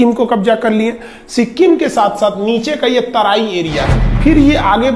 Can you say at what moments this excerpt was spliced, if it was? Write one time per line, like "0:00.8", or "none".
0:04.0